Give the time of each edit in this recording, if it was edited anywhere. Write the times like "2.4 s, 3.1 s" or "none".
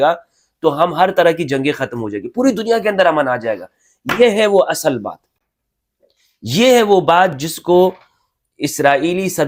none

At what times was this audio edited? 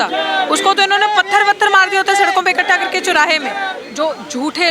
3.8 s

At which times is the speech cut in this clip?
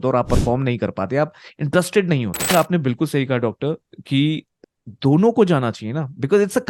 2.5 s, 4.5 s

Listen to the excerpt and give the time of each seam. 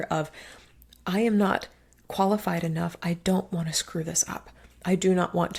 none

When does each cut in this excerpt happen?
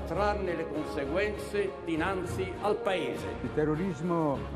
3.4 s

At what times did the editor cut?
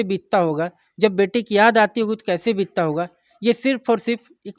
none

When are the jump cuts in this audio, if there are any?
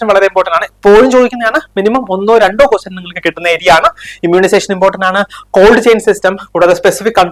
none

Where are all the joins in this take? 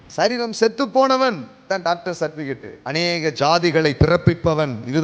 1.5 s, 2.7 s

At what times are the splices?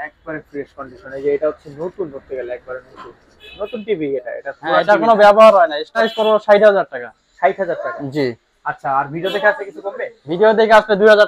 6.0 s

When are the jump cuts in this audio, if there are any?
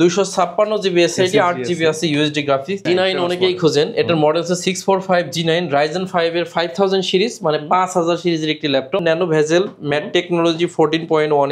2.9 s, 9.0 s

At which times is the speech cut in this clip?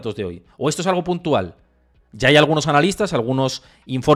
none

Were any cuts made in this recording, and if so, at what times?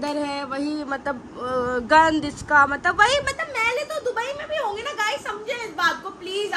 none

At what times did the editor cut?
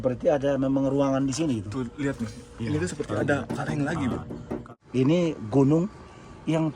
4.6 s

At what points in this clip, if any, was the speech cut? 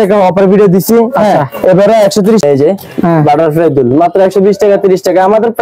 2.4 s

